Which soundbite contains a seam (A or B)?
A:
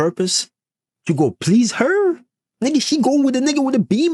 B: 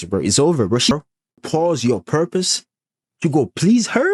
B